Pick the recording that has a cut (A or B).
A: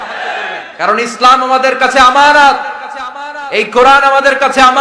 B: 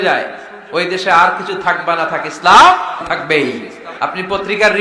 B